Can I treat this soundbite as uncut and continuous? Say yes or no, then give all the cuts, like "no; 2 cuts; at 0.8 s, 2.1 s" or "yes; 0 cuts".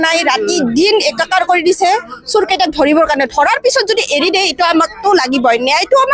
yes; 0 cuts